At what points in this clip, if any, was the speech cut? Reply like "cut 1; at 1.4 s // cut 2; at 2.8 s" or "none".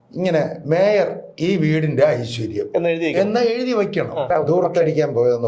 cut 1; at 4.3 s